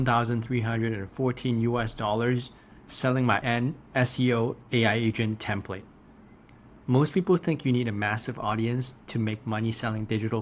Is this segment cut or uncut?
cut